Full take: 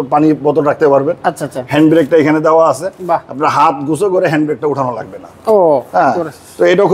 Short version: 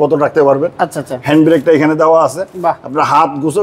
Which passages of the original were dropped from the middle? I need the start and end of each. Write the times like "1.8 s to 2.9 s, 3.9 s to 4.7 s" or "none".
none